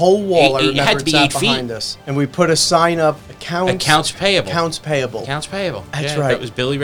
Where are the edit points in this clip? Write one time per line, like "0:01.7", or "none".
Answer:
0:02.0
0:03.3